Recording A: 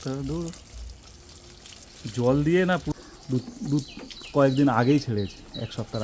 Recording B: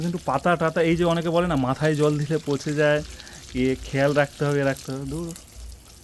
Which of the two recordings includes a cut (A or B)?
A